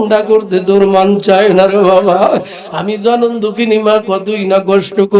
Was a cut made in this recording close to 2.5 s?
no; 0 cuts

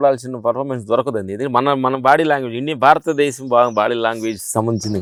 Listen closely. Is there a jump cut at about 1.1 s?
no; 0 cuts

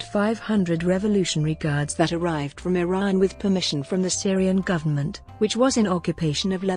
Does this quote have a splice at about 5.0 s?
no; 0 cuts

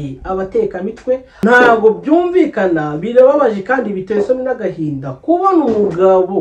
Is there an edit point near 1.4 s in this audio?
yes; 1 cut; at 1.4 s

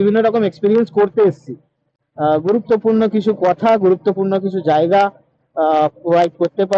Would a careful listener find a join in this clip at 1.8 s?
yes; 1 cut; at 1.8 s

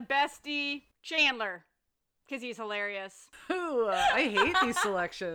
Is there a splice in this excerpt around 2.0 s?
no; 1 cut; at 3.3 s

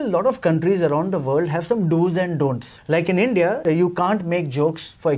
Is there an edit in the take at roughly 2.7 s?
yes; 2 cuts; at 2.7 s, 3.6 s

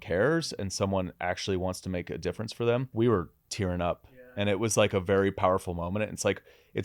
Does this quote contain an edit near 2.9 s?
yes; 1 cut; at 2.9 s

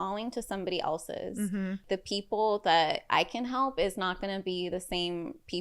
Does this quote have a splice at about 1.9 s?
yes; 1 cut; at 1.9 s

